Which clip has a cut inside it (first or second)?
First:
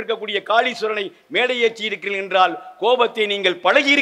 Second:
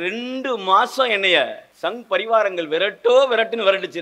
second